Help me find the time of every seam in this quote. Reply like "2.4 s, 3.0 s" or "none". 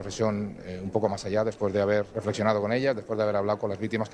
2.1 s